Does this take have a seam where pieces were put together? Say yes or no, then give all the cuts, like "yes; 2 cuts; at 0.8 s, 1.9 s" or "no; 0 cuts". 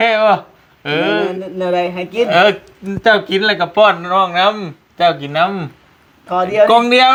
no; 0 cuts